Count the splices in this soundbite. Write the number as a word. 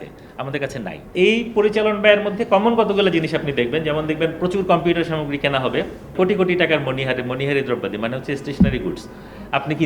two